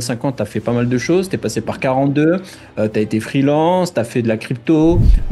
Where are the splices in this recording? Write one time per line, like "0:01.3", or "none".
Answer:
none